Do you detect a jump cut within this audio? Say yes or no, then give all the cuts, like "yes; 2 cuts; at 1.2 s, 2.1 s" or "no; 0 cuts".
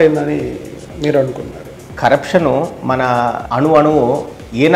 yes; 1 cut; at 3.4 s